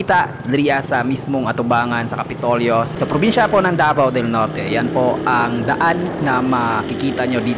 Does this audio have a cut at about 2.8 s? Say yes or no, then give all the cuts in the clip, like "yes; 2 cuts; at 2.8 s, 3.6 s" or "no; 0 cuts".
no; 0 cuts